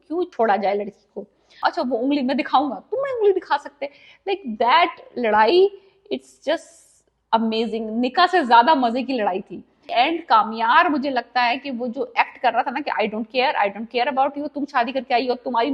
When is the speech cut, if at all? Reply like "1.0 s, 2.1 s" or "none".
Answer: 1.6 s, 9.9 s